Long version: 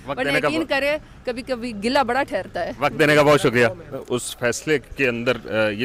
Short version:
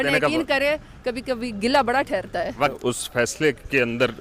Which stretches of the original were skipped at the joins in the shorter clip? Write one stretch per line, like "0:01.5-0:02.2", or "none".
0:02.9-0:04.0